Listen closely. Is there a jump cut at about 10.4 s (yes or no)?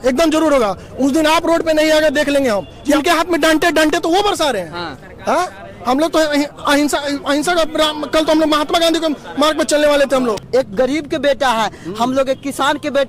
yes